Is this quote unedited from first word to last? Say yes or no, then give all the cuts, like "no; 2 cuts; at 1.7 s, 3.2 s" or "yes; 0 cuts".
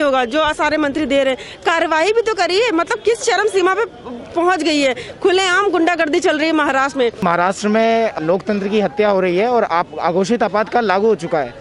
no; 2 cuts; at 7.2 s, 8.2 s